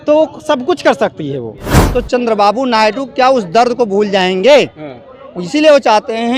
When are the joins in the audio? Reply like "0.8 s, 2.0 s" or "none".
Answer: 1.7 s